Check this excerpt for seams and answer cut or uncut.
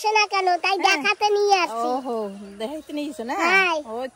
uncut